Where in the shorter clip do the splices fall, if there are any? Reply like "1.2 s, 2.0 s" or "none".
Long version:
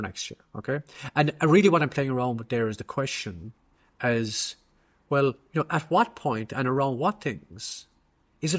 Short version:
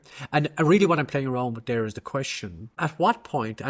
2.8 s